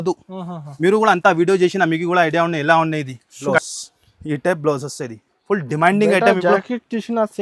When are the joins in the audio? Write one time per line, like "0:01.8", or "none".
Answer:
0:03.5